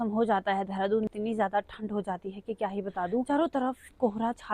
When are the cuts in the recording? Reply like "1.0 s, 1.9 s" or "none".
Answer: 1.1 s, 3.3 s